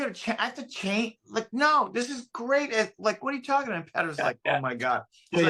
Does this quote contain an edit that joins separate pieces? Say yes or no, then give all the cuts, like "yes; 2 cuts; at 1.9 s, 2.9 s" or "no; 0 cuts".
no; 0 cuts